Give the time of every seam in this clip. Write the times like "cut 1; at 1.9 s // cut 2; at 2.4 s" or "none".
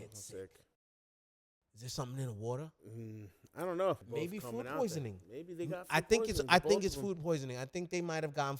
cut 1; at 4.0 s